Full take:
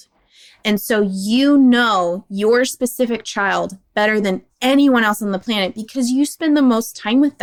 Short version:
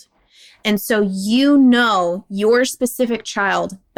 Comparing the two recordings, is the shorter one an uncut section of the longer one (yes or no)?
yes